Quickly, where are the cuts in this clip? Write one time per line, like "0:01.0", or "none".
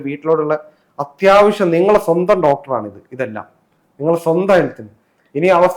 none